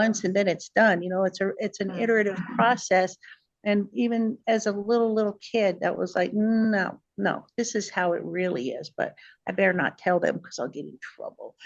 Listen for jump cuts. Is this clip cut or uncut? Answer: uncut